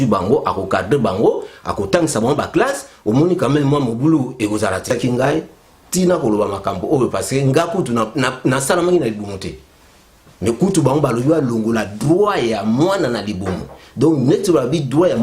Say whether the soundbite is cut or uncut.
cut